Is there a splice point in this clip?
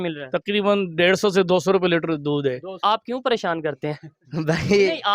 yes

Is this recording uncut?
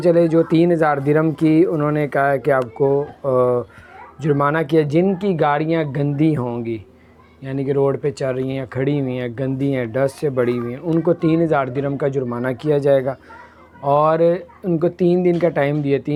yes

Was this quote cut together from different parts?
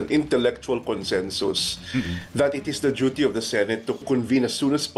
yes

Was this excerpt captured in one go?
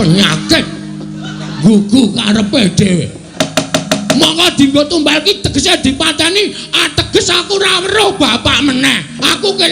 no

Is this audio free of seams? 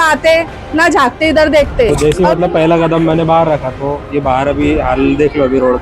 no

